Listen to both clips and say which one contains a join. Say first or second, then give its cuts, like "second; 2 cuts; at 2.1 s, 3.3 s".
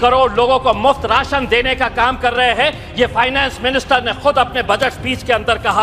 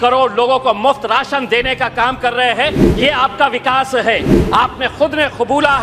second; 1 cut; at 2.9 s